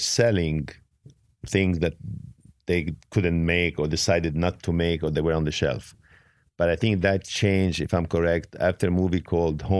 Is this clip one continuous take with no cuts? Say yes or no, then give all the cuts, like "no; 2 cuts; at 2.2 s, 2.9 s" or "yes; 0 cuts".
yes; 0 cuts